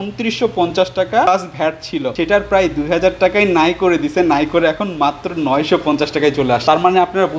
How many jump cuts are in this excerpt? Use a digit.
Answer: 0